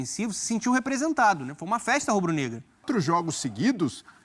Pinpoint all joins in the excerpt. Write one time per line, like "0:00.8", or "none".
0:02.8